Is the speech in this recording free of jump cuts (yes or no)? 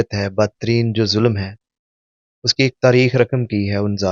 yes